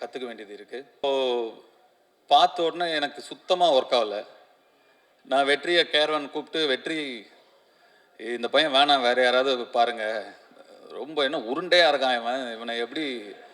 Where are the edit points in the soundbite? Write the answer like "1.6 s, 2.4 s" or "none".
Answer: 1.0 s